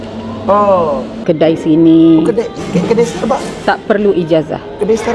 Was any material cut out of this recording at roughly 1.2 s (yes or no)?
yes